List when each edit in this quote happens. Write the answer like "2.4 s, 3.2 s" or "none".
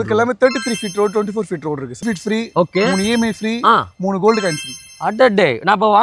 2.0 s